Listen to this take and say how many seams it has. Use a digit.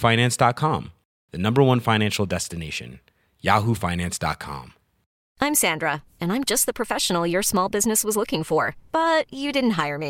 1